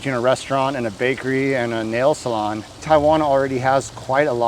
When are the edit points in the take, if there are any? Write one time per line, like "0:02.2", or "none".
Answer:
0:02.7